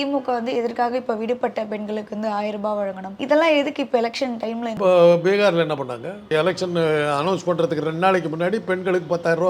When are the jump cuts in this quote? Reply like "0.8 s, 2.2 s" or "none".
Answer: 3.1 s, 4.7 s, 6.3 s

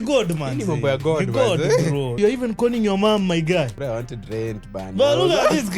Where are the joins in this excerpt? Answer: 2.2 s, 3.8 s

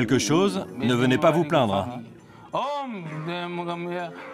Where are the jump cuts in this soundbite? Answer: none

